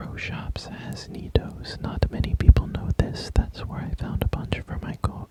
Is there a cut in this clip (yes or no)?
no